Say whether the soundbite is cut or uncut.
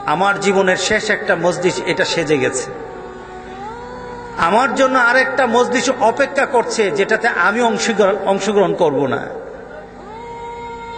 uncut